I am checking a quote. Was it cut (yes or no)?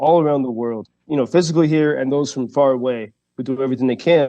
yes